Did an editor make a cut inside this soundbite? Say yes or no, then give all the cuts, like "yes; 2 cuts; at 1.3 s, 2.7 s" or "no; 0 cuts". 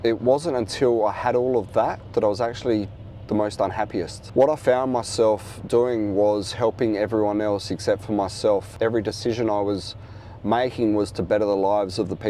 no; 0 cuts